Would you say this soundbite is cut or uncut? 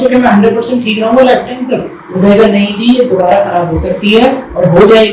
uncut